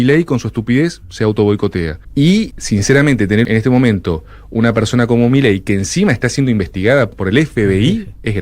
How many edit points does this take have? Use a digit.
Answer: 4